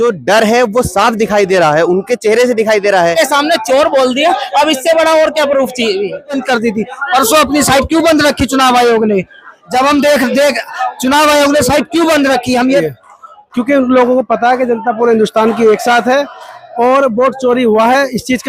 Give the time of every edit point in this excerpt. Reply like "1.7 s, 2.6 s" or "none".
3.1 s, 6.4 s, 12.9 s